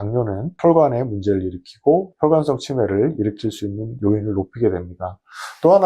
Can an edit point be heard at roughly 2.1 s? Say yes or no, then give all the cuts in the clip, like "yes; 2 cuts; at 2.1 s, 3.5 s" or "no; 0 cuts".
yes; 1 cut; at 2.1 s